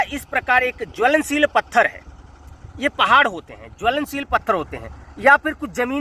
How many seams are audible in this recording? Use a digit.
0